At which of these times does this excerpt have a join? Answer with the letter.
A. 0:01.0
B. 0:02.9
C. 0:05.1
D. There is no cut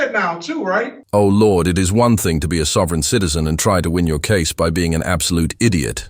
D